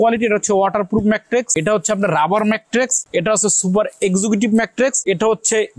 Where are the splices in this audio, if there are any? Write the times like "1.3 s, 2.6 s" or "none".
1.5 s, 3.0 s, 5.0 s